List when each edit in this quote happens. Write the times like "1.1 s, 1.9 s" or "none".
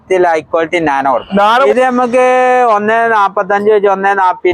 1.7 s